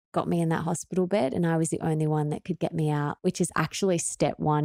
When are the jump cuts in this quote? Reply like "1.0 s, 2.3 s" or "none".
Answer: none